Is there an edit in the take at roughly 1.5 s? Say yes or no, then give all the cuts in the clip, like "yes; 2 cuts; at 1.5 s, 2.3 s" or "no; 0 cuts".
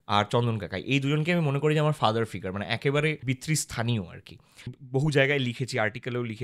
no; 2 cuts; at 3.2 s, 4.7 s